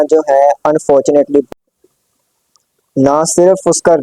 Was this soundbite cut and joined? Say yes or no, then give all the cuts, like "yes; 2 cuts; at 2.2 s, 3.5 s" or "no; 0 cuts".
yes; 1 cut; at 1.5 s